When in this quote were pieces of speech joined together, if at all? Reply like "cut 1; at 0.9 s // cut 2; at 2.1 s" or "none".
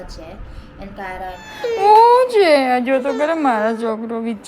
cut 1; at 1.4 s